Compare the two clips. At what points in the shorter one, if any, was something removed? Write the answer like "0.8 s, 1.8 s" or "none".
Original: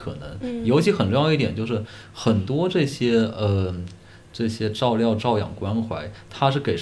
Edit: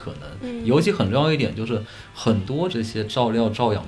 2.7 s